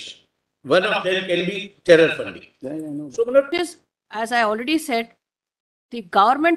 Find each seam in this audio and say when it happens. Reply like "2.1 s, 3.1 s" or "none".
3.5 s